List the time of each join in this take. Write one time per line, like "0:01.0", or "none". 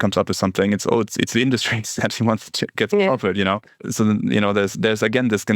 0:02.7
0:03.7